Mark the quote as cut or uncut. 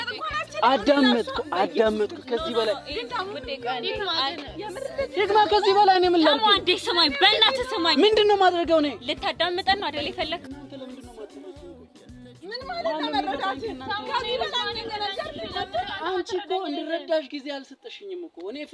cut